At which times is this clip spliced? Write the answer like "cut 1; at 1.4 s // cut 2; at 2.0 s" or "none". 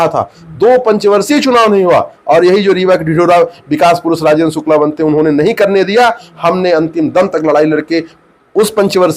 none